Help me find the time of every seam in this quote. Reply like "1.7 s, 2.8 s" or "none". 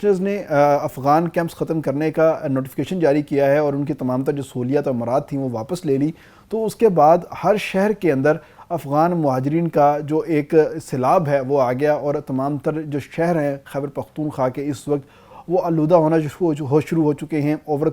none